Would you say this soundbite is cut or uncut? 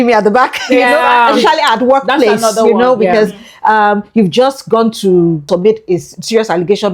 uncut